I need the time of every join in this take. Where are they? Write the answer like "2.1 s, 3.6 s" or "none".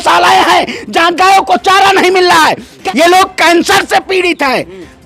2.7 s